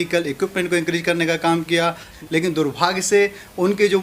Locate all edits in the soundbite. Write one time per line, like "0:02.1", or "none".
0:02.1